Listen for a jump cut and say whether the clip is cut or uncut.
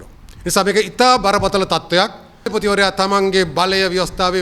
cut